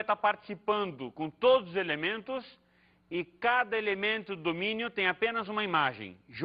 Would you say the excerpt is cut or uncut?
uncut